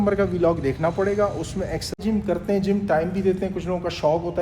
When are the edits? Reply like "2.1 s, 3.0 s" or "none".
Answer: 1.9 s

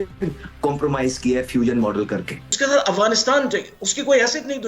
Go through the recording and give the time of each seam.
2.5 s

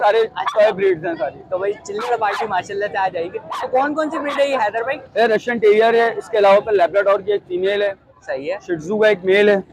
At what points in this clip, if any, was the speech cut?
none

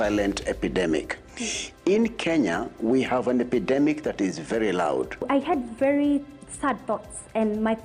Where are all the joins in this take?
5.2 s

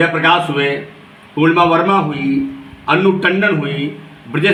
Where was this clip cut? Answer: none

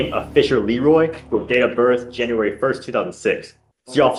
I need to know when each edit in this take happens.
none

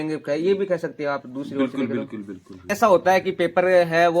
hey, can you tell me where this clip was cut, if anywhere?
2.6 s

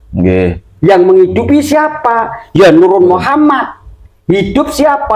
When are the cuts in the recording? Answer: none

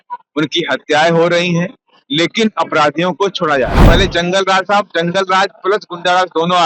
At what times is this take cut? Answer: 3.8 s

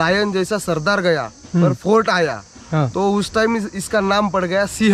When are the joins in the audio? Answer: none

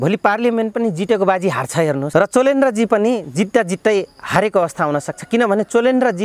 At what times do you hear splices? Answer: 2.0 s

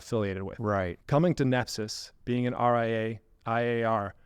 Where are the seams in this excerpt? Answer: 1.0 s

